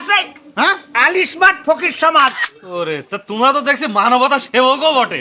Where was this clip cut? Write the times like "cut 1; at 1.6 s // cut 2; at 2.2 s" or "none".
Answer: cut 1; at 2.5 s